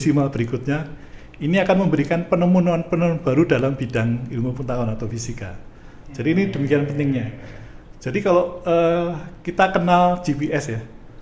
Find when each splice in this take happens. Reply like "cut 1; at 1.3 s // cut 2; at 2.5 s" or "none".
none